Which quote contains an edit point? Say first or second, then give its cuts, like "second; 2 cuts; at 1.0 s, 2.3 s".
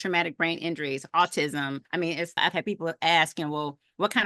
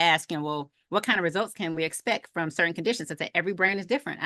first; 1 cut; at 2.1 s